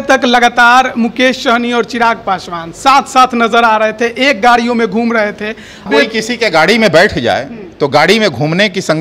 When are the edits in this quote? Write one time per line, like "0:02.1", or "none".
0:05.9